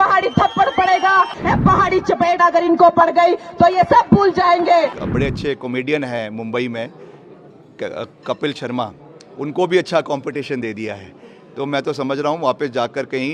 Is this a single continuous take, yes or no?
no